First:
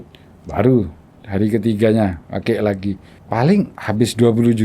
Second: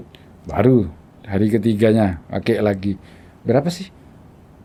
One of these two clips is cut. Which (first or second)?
first